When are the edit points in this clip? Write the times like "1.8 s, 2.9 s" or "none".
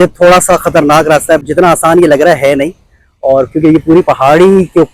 1.4 s